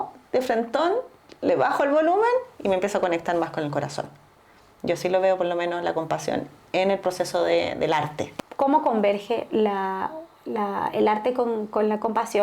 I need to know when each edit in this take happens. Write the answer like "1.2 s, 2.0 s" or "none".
8.2 s